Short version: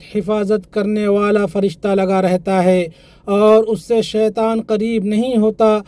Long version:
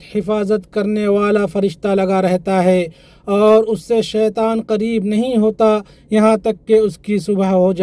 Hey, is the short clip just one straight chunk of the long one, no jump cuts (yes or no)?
yes